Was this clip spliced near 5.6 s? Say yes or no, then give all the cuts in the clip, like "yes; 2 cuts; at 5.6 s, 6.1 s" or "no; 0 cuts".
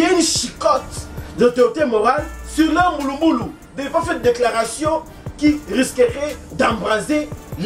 no; 0 cuts